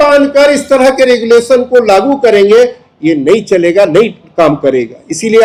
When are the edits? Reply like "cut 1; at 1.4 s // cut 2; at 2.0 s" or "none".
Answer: none